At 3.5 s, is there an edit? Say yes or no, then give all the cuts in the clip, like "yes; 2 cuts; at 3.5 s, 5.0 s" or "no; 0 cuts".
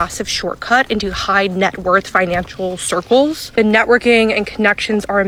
no; 0 cuts